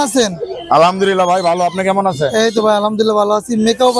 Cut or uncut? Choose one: uncut